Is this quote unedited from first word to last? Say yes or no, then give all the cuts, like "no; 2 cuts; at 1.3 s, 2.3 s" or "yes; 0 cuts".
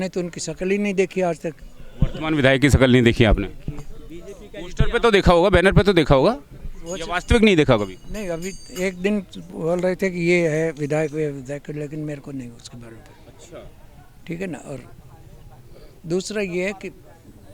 yes; 0 cuts